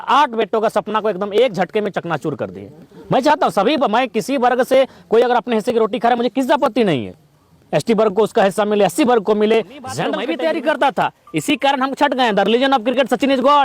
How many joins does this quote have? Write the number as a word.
one